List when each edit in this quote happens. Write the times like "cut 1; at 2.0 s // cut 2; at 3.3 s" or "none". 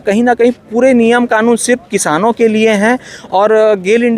none